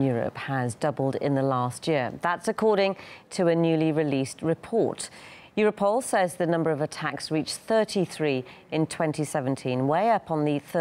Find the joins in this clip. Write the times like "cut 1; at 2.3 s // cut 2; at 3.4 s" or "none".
none